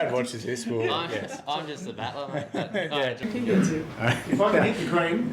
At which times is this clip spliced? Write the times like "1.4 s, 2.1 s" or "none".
3.2 s